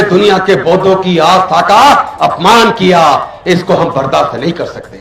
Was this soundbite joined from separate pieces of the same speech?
no; 0 cuts

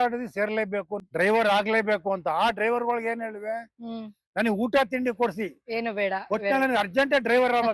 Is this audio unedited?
no; 1 cut; at 1.0 s

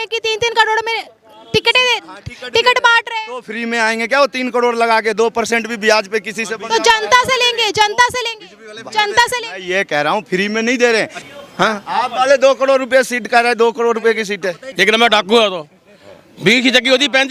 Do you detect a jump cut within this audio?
yes; 2 cuts; at 11.2 s, 14.7 s

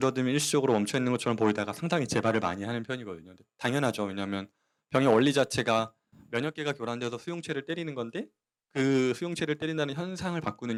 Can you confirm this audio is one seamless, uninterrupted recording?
yes; 0 cuts

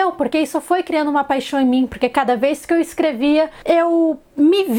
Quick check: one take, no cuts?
yes; 0 cuts

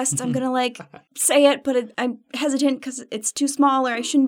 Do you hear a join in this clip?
no; 0 cuts

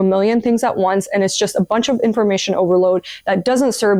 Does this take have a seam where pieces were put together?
no; 0 cuts

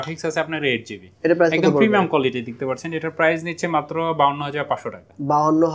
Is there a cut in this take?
no; 0 cuts

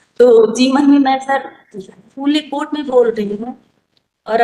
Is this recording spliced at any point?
no; 0 cuts

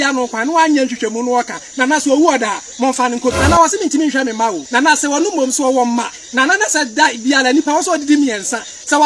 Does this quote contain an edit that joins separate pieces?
yes; 2 cuts; at 3.4 s, 4.6 s

